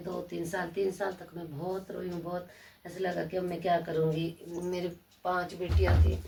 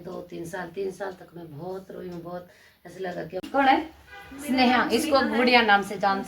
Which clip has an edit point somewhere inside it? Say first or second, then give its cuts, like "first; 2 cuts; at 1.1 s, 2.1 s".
second; 1 cut; at 3.4 s